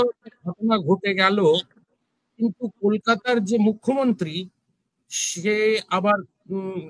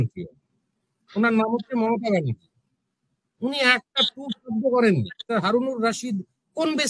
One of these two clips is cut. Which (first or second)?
second